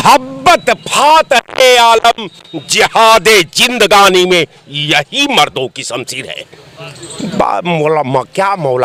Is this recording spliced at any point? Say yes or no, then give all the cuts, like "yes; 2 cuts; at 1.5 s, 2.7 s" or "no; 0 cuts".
no; 0 cuts